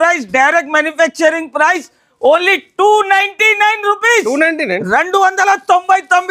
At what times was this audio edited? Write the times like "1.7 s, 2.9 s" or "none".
none